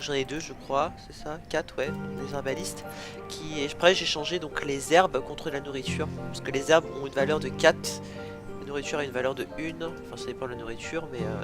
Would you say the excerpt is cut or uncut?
cut